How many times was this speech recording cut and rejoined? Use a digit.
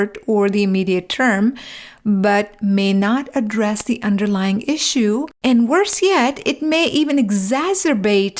1